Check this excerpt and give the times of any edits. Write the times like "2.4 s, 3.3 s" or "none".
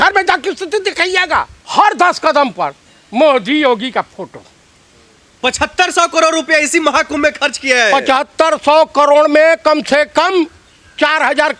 1.6 s